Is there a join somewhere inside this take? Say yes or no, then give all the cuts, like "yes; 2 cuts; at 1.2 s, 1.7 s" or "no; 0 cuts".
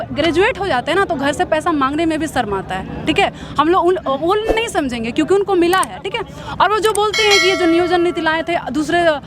no; 0 cuts